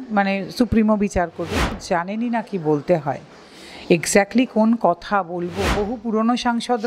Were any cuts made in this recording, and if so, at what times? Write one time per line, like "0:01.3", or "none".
0:01.8
0:05.7